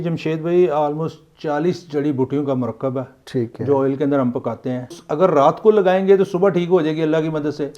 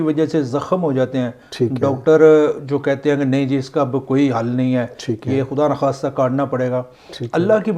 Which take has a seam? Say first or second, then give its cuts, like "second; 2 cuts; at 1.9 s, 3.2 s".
first; 1 cut; at 4.9 s